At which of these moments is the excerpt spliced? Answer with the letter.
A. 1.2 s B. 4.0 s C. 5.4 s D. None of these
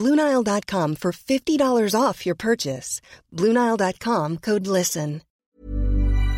C